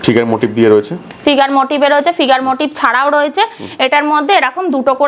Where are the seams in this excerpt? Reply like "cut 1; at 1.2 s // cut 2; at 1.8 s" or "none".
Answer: none